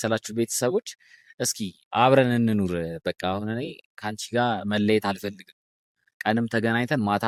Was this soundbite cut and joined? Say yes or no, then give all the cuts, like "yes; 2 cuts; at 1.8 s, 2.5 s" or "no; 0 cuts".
no; 0 cuts